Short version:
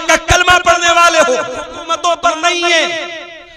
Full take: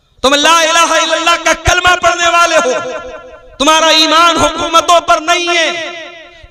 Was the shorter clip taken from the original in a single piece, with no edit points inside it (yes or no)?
no